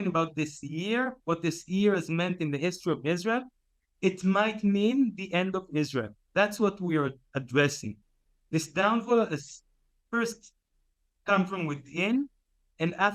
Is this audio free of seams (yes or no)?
yes